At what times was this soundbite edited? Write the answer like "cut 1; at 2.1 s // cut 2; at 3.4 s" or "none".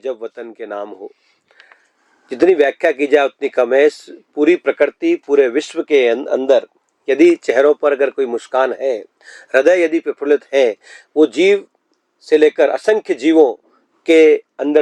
none